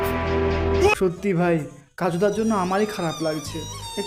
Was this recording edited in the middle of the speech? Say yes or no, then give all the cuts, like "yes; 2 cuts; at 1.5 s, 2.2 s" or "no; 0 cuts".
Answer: yes; 1 cut; at 0.9 s